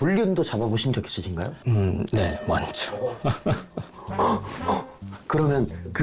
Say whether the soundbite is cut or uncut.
uncut